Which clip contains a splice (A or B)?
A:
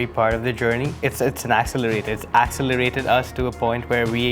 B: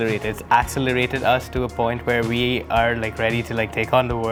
A